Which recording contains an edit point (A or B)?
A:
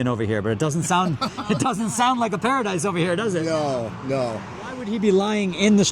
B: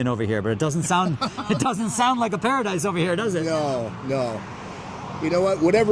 A